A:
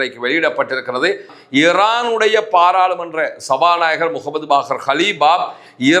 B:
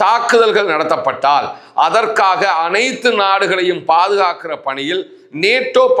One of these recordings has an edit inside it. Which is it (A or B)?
A